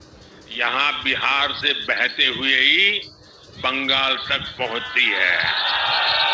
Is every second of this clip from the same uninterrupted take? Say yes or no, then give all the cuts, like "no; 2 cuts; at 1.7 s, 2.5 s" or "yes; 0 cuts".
yes; 0 cuts